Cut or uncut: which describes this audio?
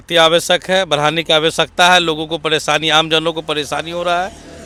uncut